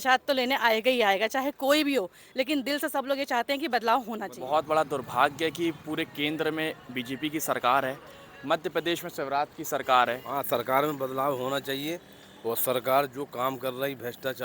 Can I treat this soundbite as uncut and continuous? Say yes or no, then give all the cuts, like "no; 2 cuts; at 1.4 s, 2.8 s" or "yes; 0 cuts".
no; 2 cuts; at 4.3 s, 10.2 s